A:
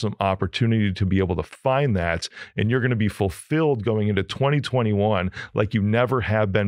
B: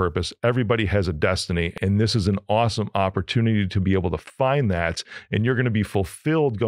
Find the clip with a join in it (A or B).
B